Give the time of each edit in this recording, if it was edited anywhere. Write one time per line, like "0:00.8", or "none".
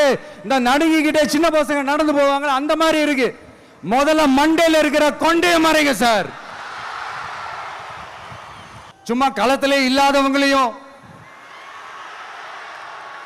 0:08.9